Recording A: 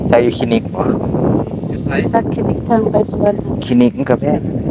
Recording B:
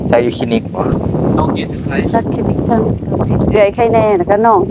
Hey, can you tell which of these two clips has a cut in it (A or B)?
B